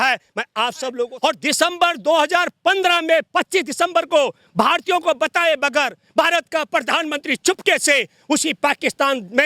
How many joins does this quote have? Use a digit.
1